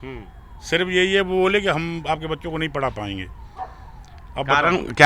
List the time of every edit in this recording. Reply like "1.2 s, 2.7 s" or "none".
none